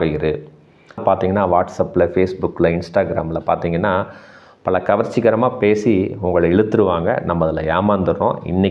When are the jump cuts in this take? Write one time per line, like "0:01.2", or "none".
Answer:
0:01.0

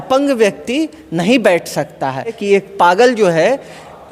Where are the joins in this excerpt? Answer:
0:02.4

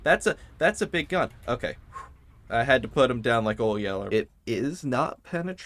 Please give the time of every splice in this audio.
0:02.3
0:04.1

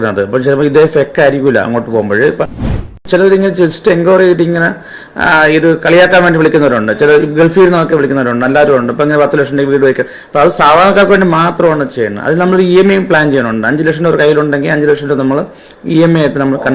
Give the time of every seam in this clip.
0:02.5

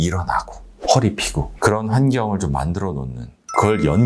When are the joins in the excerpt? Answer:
0:01.5

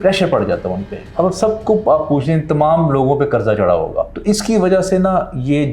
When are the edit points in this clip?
0:01.0
0:04.1

